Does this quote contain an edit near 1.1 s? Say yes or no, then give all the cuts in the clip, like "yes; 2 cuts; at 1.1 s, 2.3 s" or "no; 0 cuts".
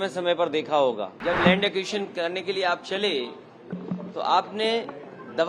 yes; 1 cut; at 1.1 s